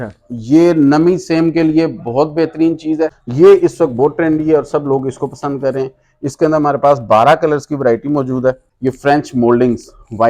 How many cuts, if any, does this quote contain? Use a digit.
2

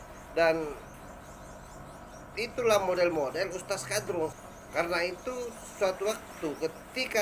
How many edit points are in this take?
1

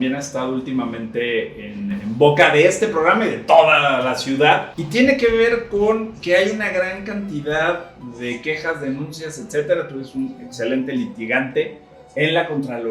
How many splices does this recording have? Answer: 1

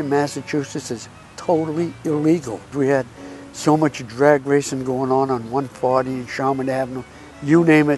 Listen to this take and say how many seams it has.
1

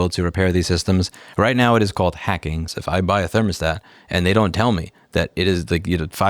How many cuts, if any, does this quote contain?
1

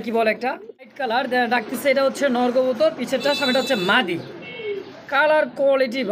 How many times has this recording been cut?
1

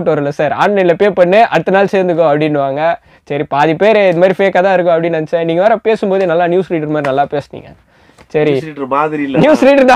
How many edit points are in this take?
0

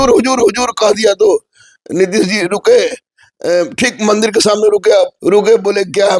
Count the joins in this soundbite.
1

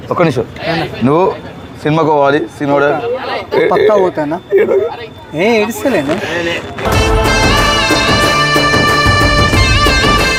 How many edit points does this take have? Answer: 0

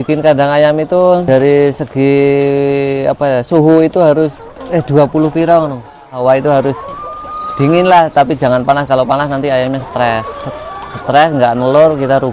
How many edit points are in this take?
1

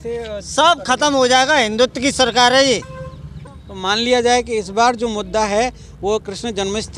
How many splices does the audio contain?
0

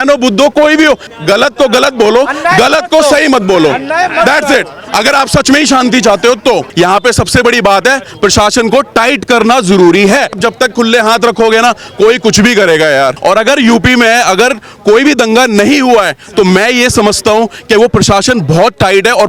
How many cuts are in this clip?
4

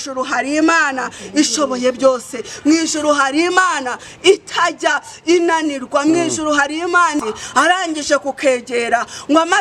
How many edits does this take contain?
1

